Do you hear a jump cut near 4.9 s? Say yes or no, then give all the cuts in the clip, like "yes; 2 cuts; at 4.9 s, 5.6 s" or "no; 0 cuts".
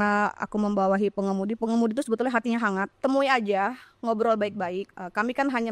yes; 2 cuts; at 2.9 s, 4.9 s